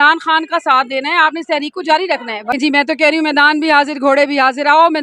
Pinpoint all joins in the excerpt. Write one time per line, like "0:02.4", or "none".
0:02.5